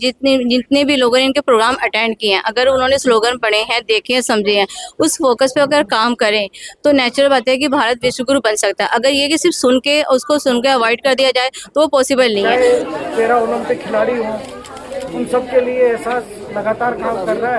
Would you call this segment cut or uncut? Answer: cut